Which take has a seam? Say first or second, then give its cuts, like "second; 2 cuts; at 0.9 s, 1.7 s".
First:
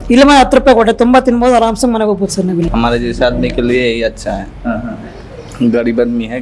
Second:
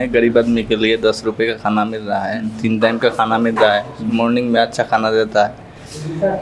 first; 1 cut; at 2.7 s